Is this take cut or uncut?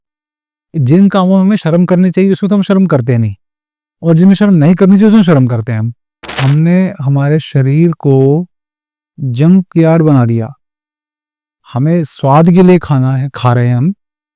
cut